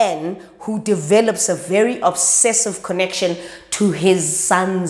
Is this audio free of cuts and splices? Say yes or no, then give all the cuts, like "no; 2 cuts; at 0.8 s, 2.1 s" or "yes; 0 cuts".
yes; 0 cuts